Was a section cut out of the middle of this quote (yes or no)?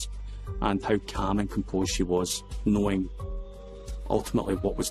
no